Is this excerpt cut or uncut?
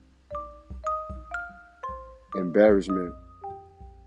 uncut